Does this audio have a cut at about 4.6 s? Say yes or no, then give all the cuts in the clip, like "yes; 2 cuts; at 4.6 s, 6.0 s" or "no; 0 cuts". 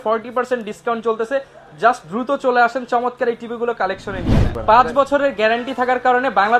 yes; 1 cut; at 4.6 s